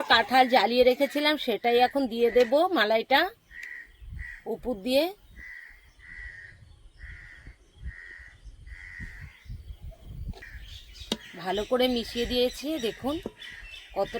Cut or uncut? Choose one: cut